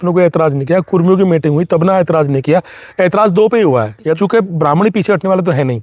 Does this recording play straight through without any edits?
no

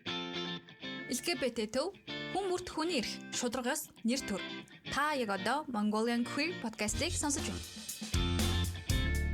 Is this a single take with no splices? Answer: yes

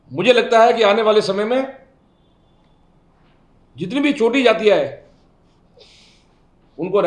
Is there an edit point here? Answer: no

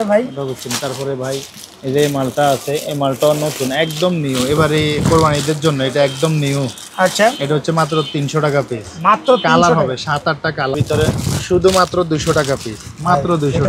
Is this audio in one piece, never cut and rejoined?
no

